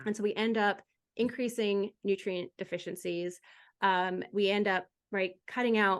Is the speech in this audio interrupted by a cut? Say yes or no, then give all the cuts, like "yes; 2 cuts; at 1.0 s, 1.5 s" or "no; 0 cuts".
no; 0 cuts